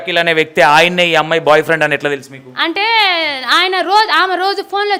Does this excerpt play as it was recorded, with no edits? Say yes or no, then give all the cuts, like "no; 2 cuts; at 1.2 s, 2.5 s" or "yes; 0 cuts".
yes; 0 cuts